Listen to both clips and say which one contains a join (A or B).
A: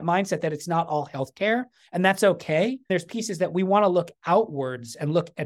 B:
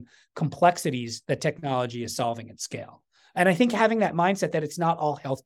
A